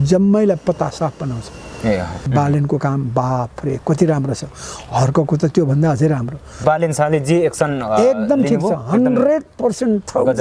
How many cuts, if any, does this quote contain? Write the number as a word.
two